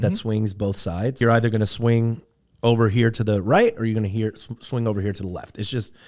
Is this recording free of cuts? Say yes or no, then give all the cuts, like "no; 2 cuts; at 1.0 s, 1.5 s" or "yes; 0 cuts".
no; 1 cut; at 1.2 s